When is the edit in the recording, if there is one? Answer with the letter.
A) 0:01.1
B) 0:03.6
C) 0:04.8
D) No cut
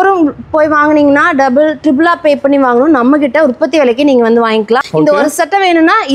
C